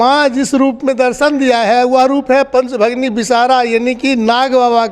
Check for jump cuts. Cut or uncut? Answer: uncut